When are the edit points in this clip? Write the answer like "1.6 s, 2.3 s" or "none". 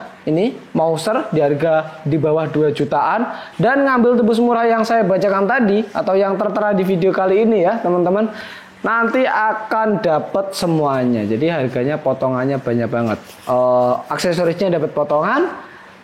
none